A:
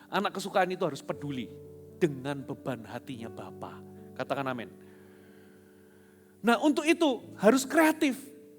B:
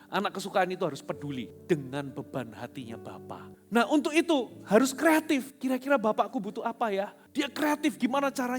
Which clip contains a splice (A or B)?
B